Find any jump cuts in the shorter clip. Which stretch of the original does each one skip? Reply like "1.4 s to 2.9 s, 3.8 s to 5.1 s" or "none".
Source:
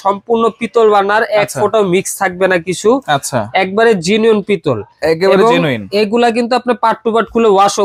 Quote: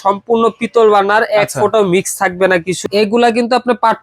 2.8 s to 5.8 s